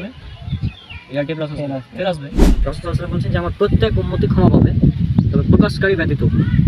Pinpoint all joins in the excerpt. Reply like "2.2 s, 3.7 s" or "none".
2.6 s